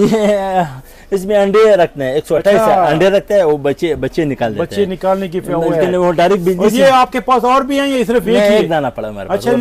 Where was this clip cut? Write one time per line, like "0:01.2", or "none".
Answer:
none

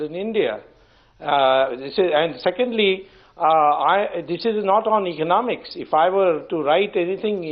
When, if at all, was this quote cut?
0:03.2

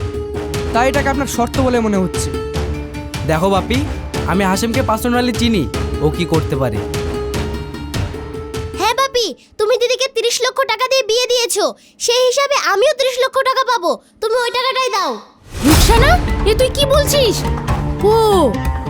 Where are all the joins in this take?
none

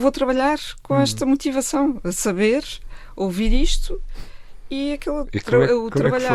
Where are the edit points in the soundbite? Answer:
none

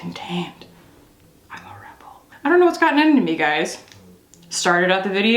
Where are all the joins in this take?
0:02.3

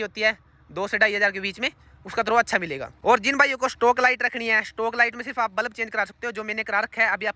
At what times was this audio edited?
none

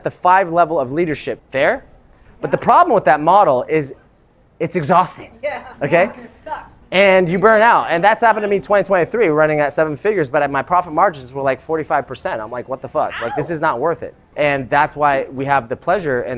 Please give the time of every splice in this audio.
0:01.3
0:14.2

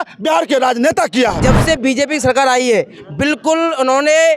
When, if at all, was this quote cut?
0:01.4

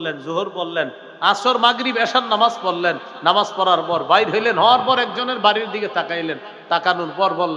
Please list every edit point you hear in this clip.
none

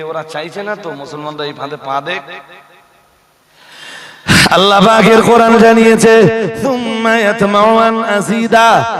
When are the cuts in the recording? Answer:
0:03.5

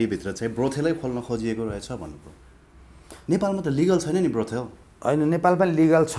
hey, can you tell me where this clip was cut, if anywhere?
none

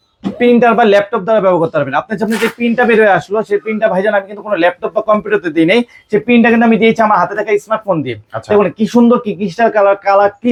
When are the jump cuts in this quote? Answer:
none

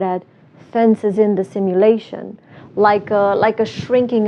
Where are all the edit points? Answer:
none

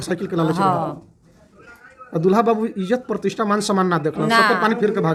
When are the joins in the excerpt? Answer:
none

